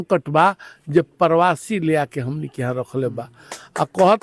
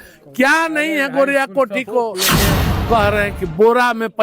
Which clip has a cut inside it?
second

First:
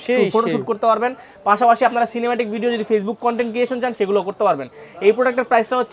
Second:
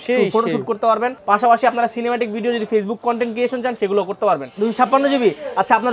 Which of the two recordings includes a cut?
second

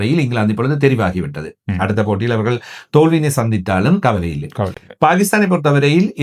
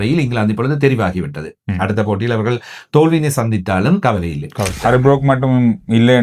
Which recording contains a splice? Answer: second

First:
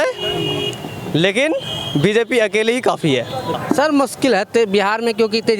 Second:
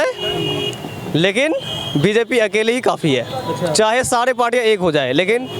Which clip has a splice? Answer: first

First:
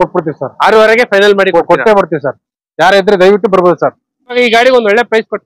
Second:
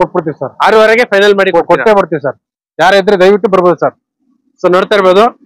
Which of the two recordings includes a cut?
first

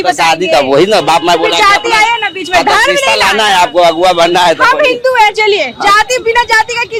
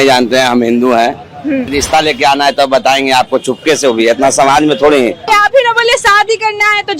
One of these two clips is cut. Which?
second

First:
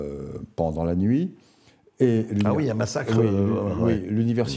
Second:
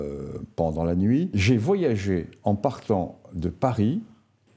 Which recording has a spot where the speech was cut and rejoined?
second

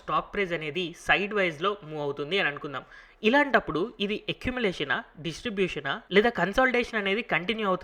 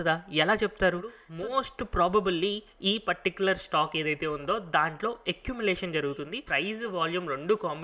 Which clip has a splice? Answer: second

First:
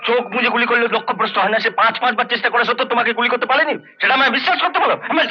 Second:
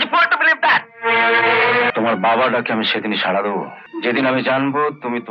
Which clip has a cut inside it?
second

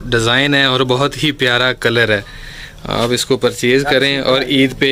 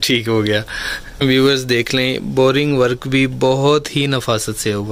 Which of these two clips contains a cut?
second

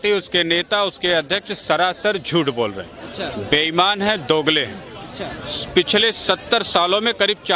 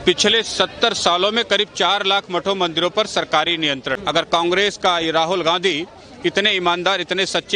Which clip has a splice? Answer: second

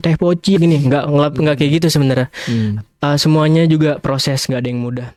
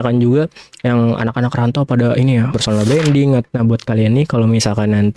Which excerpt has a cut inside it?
second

